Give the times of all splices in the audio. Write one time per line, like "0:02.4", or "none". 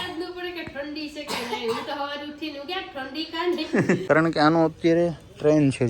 0:04.0